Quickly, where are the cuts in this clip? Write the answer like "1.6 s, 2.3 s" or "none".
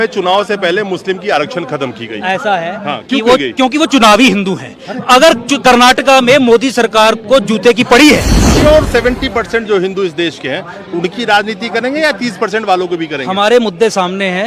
8.5 s